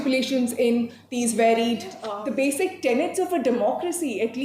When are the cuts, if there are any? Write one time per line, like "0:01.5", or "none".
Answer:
0:02.1